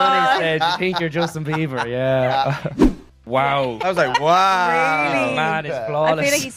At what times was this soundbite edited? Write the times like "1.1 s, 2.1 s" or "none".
3.1 s